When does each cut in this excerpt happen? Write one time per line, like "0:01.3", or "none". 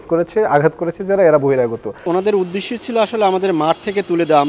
0:02.0